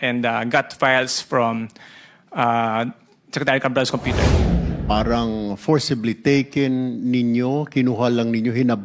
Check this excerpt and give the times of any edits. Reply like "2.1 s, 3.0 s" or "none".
4.5 s

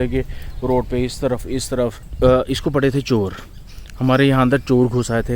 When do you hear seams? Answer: 2.0 s

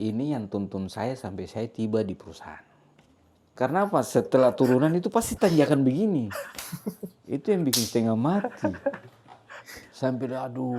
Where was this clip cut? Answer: 3.5 s

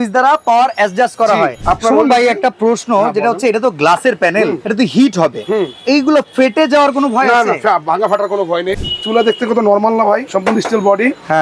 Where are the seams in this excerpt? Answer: 1.6 s, 4.6 s, 8.8 s, 10.3 s

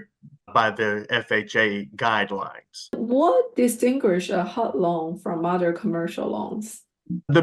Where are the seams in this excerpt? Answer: 3.0 s

